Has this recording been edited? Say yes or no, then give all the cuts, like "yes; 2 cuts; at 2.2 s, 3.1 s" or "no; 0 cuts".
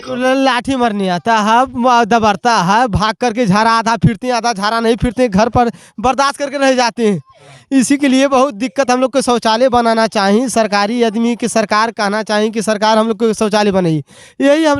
no; 0 cuts